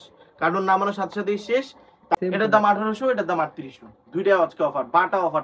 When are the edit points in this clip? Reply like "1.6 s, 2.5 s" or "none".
2.2 s